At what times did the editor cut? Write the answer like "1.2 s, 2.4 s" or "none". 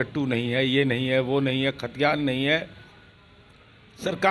none